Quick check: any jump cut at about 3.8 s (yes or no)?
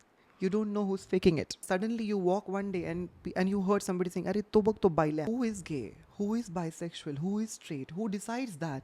no